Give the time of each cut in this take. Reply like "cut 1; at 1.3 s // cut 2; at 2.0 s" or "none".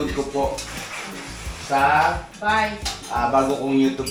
none